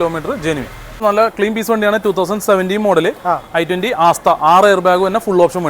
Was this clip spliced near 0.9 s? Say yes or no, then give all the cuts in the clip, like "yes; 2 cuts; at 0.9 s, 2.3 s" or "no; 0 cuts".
yes; 1 cut; at 0.9 s